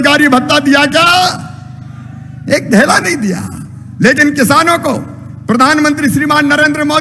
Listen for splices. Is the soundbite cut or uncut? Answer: uncut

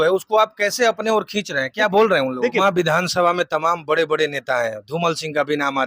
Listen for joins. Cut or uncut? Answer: cut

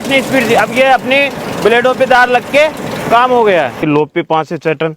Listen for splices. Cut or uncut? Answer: cut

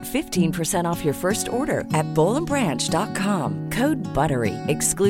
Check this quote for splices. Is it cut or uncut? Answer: uncut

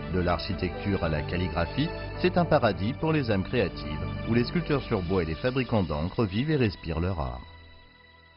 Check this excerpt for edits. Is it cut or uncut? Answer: cut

